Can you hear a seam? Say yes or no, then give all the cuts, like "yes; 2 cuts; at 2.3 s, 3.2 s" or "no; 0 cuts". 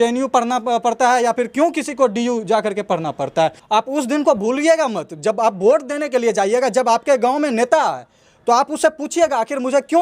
yes; 1 cut; at 3.6 s